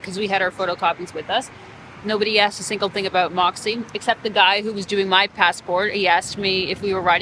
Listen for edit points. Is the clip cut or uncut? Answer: uncut